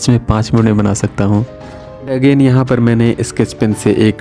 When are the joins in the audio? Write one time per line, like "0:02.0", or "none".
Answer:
0:01.6